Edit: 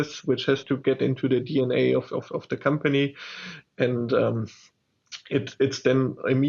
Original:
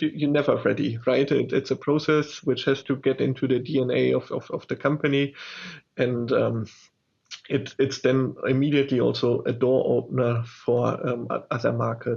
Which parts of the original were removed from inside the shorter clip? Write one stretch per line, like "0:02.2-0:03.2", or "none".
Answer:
none